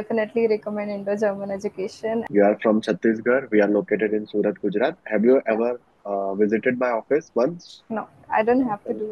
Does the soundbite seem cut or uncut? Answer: cut